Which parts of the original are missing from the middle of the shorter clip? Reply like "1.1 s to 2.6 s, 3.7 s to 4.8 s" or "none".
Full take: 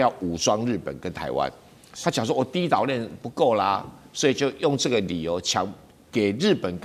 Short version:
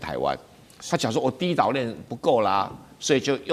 none

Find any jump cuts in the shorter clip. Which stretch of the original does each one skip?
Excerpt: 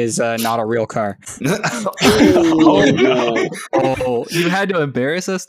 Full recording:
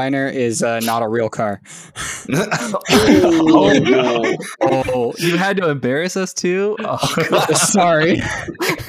1.7 s to 2.1 s

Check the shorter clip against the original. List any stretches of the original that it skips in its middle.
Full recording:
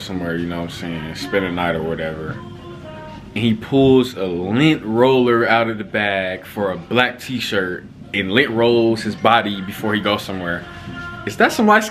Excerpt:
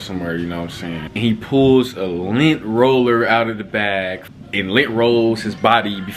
1.1 s to 3.3 s, 6.4 s to 7.8 s

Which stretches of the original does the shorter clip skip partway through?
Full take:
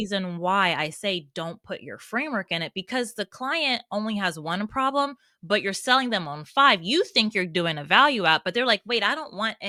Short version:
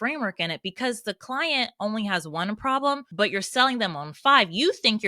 5.2 s to 5.4 s

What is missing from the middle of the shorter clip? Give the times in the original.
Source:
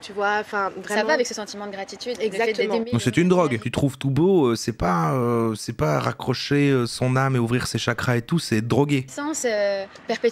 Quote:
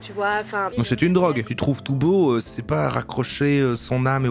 0.7 s to 2.9 s, 4.7 s to 5.6 s

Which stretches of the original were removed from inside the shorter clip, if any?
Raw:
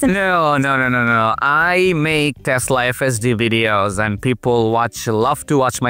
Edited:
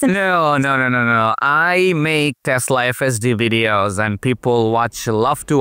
none

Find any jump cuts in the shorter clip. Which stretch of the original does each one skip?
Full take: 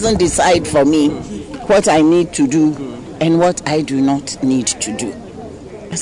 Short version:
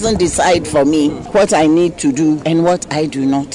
1.2 s to 1.6 s, 2.8 s to 3.2 s

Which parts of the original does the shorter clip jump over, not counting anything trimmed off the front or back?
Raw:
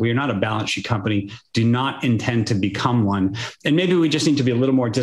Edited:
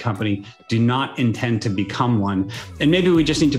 none

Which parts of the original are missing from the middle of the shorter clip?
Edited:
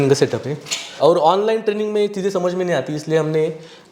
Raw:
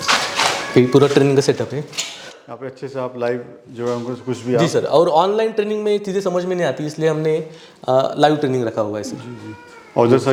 2.2 s to 4.9 s

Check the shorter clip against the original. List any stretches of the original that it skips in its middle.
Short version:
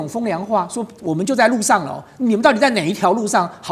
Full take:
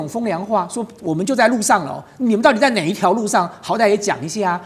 none

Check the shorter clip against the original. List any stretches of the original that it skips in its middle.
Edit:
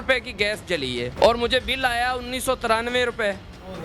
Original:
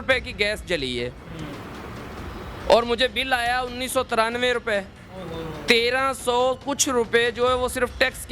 1.1 s to 2.6 s

